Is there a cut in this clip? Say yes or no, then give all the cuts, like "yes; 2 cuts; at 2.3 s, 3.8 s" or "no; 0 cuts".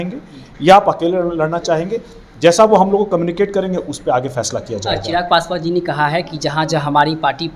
no; 0 cuts